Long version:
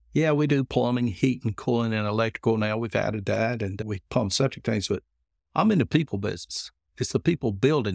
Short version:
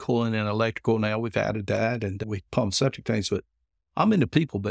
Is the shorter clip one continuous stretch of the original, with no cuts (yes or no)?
yes